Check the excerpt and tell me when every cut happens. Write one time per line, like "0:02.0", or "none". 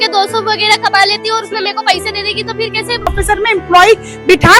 0:03.1